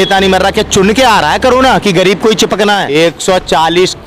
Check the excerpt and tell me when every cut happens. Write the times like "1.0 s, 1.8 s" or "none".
2.9 s